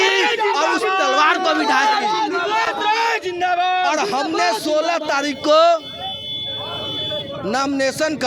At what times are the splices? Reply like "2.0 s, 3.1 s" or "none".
none